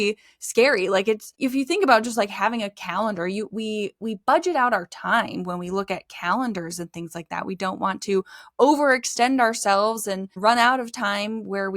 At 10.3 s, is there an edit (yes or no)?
yes